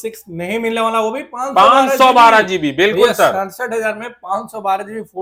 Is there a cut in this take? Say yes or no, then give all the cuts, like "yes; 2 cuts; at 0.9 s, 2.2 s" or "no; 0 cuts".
no; 0 cuts